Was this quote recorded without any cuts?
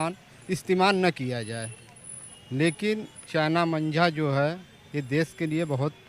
yes; 0 cuts

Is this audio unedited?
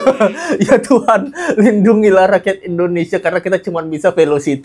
yes; 0 cuts

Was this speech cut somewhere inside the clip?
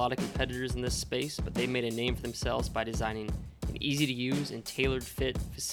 no; 0 cuts

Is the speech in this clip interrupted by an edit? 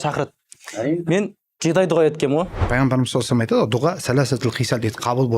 yes; 1 cut; at 2.6 s

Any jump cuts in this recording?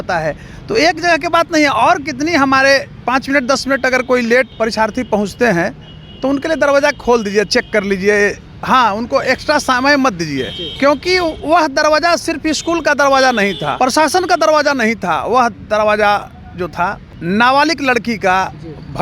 yes; 5 cuts; at 3.0 s, 4.5 s, 10.6 s, 13.7 s, 17.1 s

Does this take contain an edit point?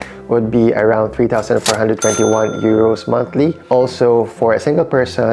no; 0 cuts

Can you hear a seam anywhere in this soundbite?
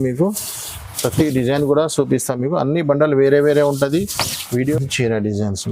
yes; 1 cut; at 4.8 s

